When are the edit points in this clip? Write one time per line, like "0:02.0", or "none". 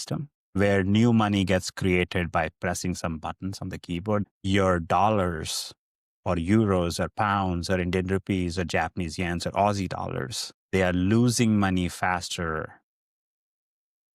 0:04.2